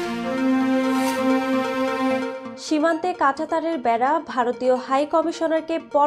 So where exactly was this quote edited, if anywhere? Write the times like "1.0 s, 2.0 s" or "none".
2.4 s